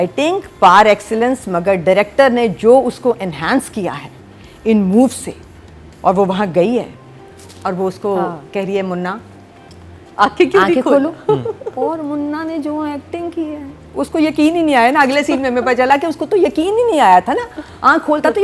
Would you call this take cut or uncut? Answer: uncut